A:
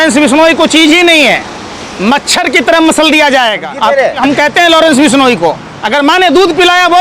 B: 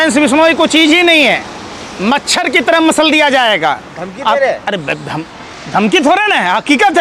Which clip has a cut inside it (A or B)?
A